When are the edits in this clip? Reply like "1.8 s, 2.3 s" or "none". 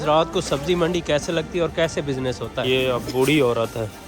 2.6 s